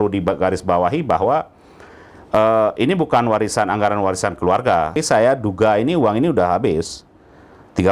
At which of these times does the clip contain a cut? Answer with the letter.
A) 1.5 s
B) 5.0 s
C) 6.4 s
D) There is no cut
B